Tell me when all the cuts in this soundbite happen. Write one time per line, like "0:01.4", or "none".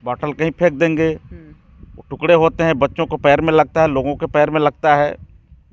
none